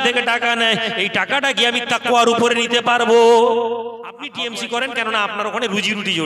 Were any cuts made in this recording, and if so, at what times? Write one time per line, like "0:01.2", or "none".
0:04.3